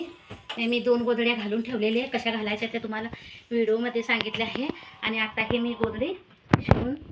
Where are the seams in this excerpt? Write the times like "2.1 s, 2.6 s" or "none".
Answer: none